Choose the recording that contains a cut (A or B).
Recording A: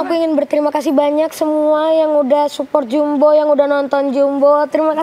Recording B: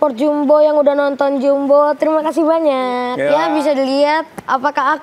B